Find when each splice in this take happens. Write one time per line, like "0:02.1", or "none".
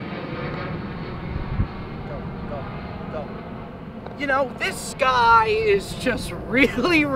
none